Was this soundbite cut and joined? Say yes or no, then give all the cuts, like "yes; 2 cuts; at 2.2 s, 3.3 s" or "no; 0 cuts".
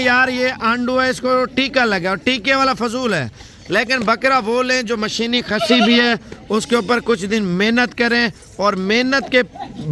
no; 0 cuts